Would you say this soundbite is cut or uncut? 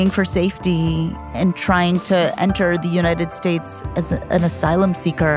cut